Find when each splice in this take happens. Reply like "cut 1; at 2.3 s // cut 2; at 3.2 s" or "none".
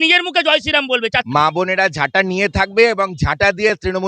cut 1; at 1.1 s